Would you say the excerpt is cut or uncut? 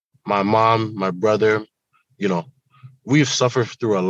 uncut